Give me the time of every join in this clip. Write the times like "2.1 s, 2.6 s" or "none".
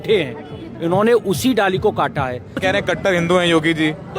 2.6 s